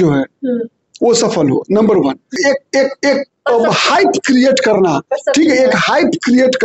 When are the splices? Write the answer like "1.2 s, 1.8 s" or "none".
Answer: 2.4 s